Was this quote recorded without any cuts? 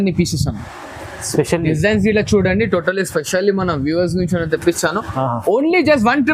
yes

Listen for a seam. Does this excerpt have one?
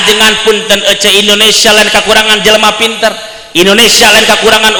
no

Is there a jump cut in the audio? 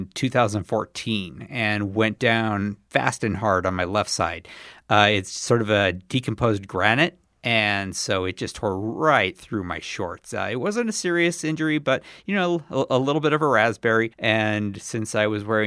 yes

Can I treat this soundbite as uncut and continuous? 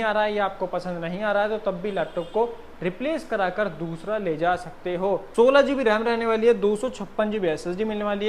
no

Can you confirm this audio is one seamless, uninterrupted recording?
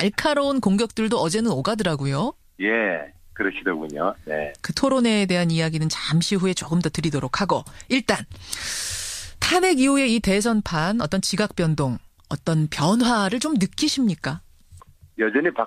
no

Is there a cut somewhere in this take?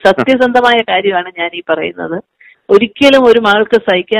no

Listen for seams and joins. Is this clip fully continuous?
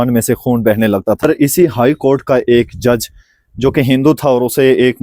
no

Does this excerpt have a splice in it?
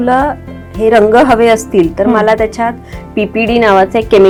no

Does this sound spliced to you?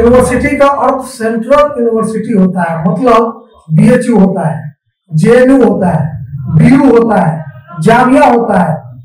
no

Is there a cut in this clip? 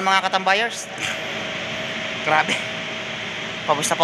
no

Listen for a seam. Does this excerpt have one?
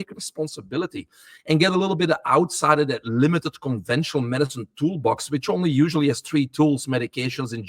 no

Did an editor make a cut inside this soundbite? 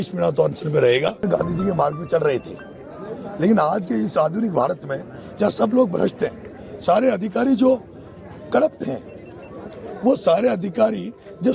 yes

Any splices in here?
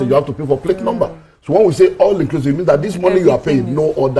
no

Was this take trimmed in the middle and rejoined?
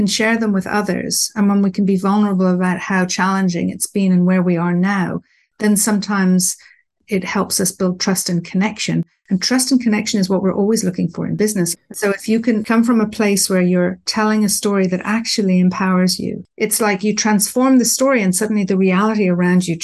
yes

